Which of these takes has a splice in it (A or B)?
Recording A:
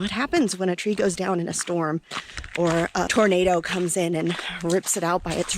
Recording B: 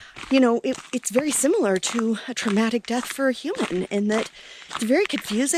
A